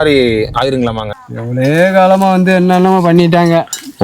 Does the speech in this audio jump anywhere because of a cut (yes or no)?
yes